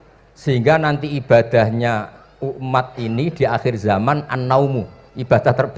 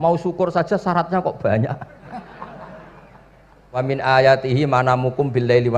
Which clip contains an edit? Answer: second; 1 cut; at 3.8 s

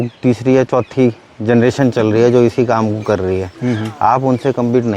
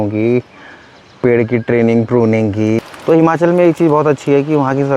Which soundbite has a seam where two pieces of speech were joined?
second; 1 cut; at 2.8 s

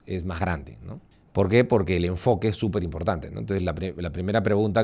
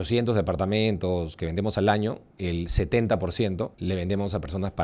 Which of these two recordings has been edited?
second; 2 cuts; at 2.3 s, 3.8 s

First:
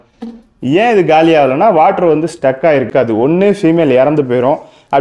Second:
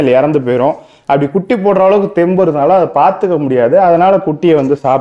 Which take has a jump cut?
first; 1 cut; at 2.9 s

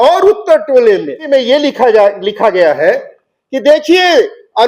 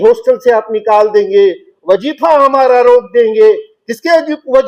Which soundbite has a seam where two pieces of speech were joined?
first; 1 cut; at 1.2 s

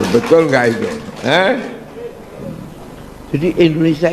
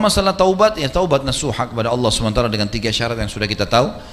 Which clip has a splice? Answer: first; 1 cut; at 2.9 s

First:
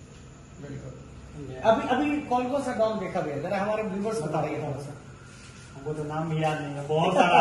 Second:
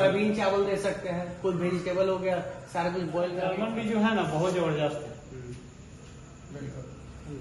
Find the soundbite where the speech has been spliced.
second; 1 cut; at 3.5 s

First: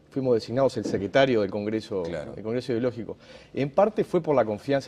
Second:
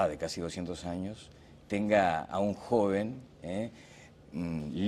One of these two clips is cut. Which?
second; 1 cut; at 2.3 s

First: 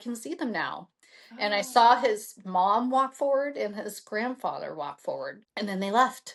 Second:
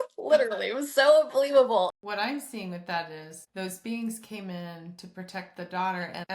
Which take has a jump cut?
second; 1 cut; at 1.9 s

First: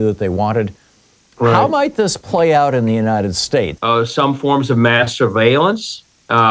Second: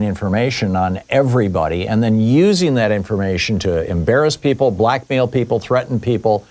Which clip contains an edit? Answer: first; 1 cut; at 3.8 s

